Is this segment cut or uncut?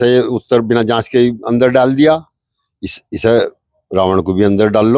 uncut